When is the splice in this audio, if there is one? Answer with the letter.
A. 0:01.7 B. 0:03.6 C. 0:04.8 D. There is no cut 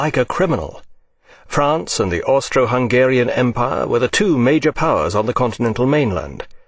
B